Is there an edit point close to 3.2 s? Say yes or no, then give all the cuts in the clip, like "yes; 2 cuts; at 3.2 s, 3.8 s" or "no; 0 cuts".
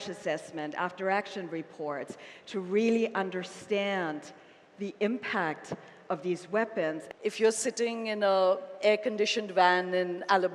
no; 1 cut; at 7.0 s